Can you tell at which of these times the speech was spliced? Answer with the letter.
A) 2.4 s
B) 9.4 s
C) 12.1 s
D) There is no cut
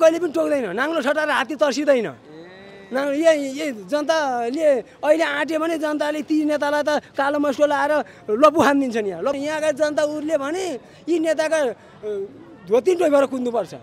B